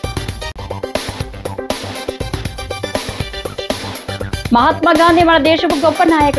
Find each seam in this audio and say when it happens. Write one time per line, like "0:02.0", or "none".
0:03.3

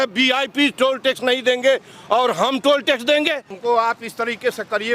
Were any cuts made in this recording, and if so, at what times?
0:03.5

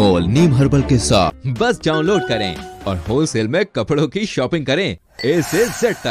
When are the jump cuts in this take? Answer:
0:01.4

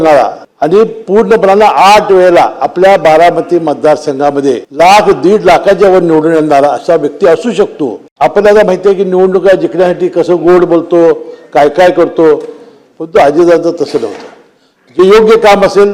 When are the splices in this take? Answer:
none

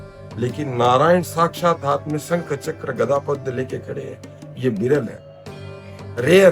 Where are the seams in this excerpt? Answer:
none

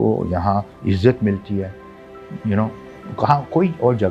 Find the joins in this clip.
none

